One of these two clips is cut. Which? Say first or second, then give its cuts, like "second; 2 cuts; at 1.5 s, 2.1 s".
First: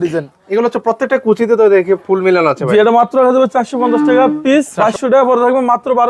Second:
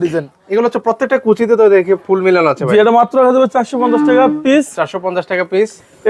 first; 1 cut; at 4.7 s